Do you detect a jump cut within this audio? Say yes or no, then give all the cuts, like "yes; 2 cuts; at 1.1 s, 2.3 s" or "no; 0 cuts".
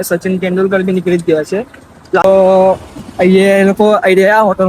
yes; 1 cut; at 2.2 s